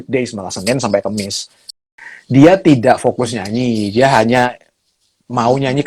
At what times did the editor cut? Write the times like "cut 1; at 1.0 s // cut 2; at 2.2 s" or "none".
cut 1; at 1.9 s